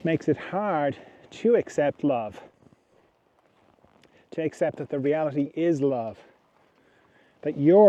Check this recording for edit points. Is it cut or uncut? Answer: uncut